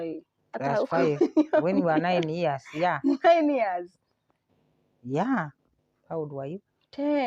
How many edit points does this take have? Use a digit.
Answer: 1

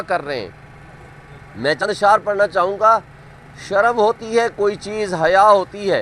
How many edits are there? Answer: 1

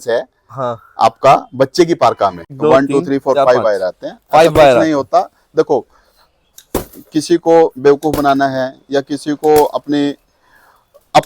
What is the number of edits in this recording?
1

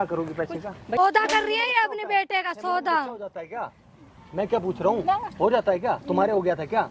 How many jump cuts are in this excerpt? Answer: 1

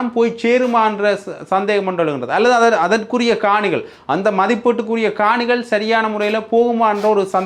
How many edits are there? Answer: 0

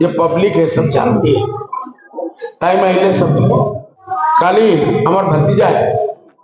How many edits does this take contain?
1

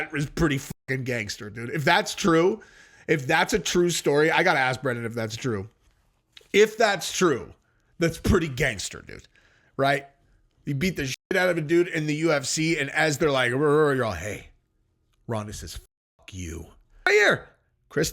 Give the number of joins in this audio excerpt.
1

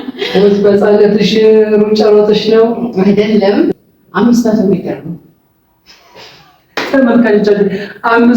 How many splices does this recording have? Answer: 1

